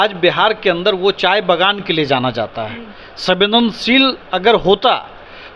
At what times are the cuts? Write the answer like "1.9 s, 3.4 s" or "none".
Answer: none